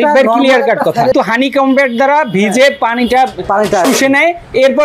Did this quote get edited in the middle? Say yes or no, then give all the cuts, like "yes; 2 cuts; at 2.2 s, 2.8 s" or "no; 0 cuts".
yes; 1 cut; at 1.1 s